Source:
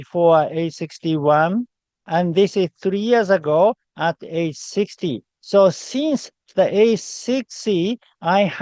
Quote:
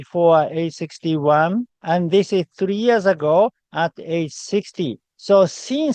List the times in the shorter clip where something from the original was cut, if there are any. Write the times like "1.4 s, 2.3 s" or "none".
1.7 s